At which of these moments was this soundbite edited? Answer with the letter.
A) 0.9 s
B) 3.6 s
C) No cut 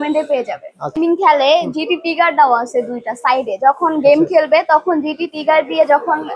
A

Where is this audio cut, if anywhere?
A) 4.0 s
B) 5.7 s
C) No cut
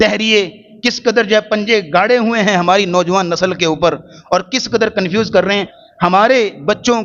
B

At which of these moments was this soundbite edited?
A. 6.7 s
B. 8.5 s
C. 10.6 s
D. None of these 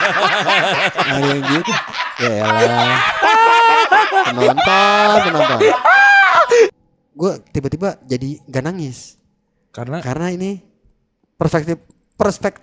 A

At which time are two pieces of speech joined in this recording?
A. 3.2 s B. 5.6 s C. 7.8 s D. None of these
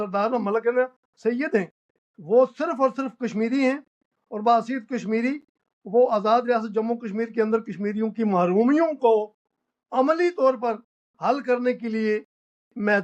D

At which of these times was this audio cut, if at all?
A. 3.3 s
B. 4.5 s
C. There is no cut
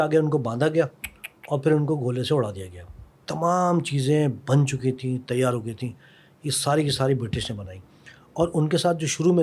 A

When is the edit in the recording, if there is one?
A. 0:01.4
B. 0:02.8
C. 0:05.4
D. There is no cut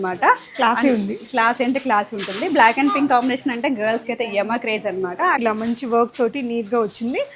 C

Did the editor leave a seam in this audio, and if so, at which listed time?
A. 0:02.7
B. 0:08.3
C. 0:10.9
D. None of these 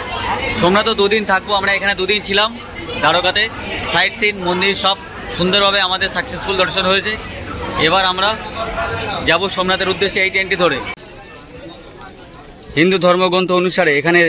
C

